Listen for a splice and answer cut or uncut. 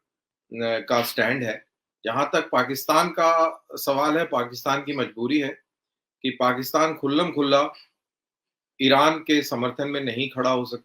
uncut